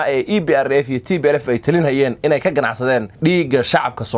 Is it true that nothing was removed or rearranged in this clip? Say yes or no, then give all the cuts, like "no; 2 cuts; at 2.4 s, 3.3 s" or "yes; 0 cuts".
no; 1 cut; at 3.1 s